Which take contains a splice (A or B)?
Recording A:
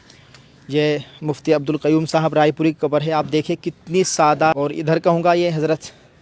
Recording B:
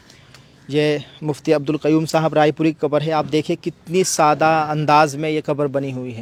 A